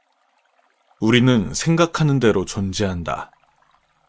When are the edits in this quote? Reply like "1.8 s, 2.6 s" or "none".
1.0 s